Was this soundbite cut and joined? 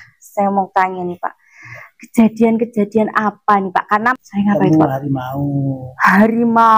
yes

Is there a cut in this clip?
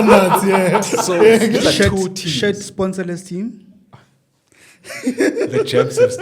yes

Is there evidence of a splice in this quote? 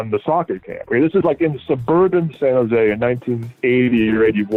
no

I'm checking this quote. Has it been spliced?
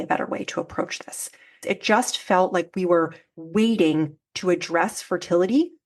yes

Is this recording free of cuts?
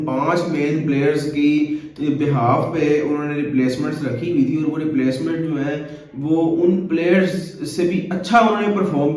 yes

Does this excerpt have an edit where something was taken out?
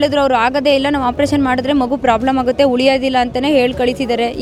no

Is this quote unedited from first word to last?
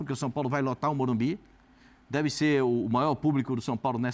yes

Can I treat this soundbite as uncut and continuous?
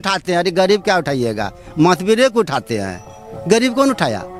yes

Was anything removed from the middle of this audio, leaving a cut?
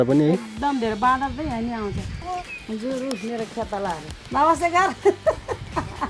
yes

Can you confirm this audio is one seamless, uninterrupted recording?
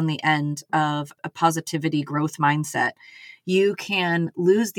no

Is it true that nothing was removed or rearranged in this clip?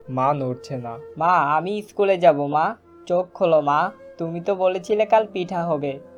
yes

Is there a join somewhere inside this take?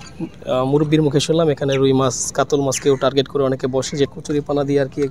yes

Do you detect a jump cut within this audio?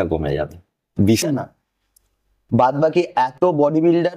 yes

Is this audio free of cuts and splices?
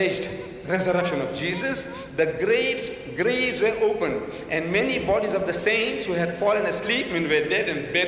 no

